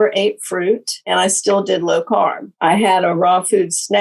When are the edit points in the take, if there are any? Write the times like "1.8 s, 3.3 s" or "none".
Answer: 0.9 s, 2.5 s